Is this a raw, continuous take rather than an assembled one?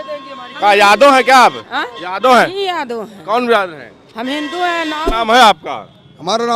no; 1 cut; at 5.0 s

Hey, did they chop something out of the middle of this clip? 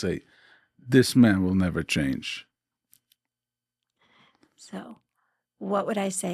no; 0 cuts

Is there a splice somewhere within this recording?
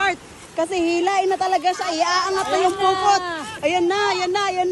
no; 0 cuts

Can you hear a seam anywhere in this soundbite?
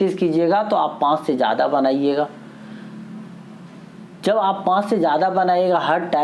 no; 0 cuts

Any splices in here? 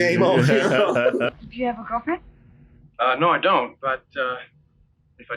yes; 1 cut; at 1.3 s

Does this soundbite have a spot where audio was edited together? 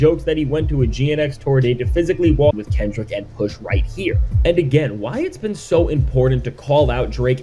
yes; 1 cut; at 2.6 s

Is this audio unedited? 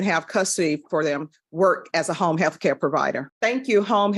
yes; 0 cuts

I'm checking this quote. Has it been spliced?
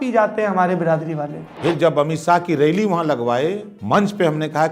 yes; 2 cuts; at 1.7 s, 3.7 s

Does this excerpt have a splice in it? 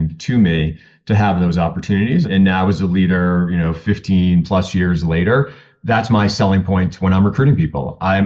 yes; 1 cut; at 2.3 s

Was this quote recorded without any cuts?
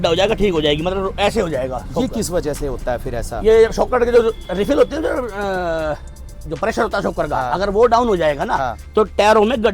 yes; 0 cuts

